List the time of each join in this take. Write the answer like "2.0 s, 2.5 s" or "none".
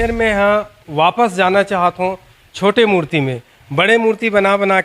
none